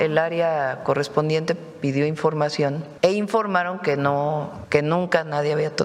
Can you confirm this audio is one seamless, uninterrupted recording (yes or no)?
no